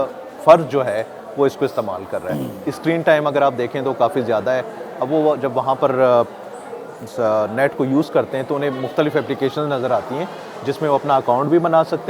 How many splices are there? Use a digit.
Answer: 0